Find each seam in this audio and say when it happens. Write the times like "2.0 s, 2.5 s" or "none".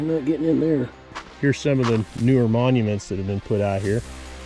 1.3 s